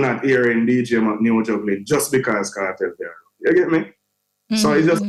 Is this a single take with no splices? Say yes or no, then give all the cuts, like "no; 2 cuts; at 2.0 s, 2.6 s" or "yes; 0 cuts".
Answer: yes; 0 cuts